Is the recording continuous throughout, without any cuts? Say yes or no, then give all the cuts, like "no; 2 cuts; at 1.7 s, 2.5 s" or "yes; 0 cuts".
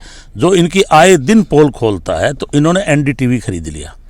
yes; 0 cuts